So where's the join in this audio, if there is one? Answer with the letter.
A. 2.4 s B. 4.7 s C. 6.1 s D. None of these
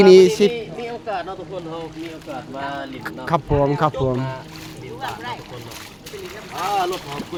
D